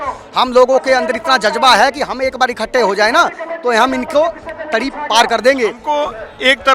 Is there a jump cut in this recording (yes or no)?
yes